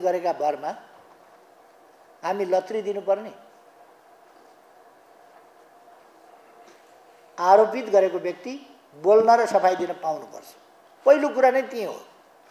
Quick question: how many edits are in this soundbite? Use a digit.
0